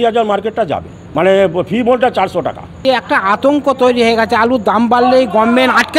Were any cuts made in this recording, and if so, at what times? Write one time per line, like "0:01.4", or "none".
0:01.0
0:02.8